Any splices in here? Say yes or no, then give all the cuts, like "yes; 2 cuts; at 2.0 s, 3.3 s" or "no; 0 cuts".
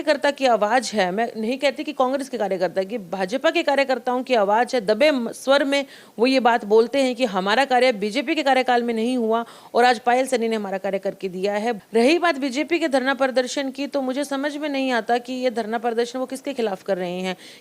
yes; 1 cut; at 11.8 s